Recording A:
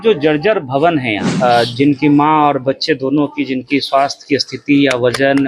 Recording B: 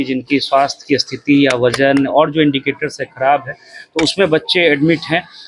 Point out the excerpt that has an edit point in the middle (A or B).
A